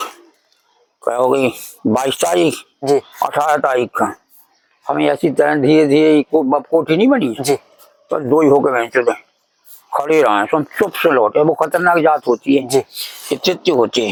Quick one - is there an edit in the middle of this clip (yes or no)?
no